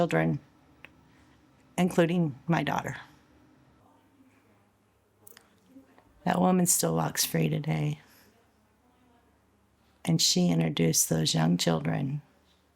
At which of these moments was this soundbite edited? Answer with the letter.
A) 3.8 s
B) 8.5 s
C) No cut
A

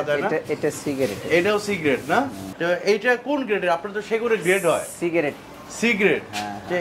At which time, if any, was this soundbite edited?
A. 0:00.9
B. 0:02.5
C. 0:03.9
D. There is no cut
B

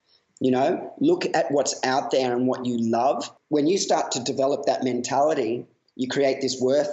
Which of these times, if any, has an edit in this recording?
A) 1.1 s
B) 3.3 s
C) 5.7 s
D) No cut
B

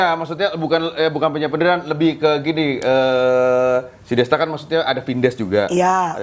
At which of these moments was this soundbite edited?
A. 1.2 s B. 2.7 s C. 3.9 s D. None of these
D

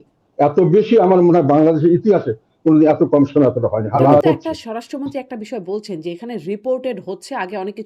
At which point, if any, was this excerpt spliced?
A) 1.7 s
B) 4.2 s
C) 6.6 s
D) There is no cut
B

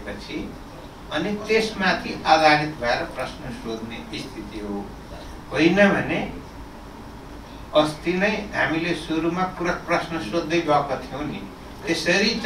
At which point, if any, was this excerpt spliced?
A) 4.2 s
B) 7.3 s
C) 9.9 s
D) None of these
D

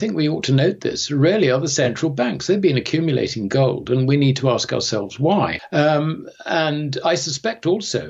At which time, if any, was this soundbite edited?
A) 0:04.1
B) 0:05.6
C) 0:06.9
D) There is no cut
B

